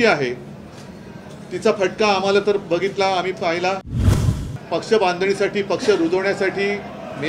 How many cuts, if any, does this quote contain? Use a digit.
1